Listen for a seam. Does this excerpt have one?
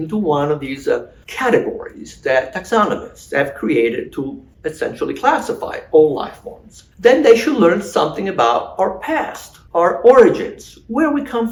no; 0 cuts

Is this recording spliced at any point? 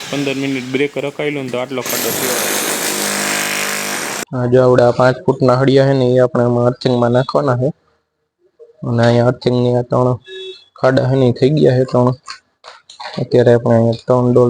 yes; 1 cut; at 4.2 s

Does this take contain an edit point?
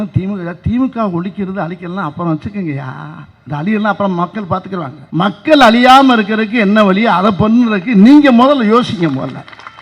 yes; 1 cut; at 5.0 s

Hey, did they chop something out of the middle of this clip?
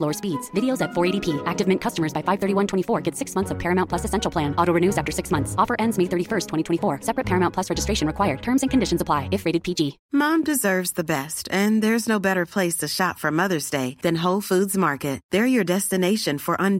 yes; 1 cut; at 10.0 s

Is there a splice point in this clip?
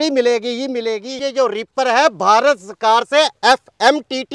yes; 1 cut; at 1.1 s

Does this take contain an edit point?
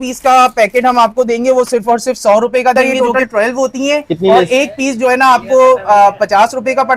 yes; 1 cut; at 2.7 s

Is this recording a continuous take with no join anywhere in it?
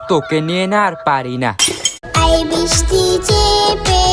no; 1 cut; at 1.9 s

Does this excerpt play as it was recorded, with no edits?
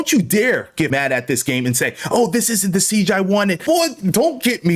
no; 2 cuts; at 0.9 s, 3.6 s

